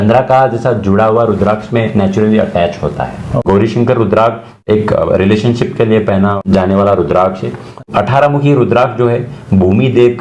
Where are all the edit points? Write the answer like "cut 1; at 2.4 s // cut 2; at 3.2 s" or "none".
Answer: cut 1; at 3.3 s // cut 2; at 4.6 s // cut 3; at 6.4 s // cut 4; at 7.8 s